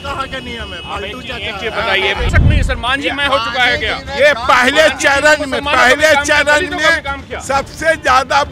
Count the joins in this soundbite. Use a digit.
1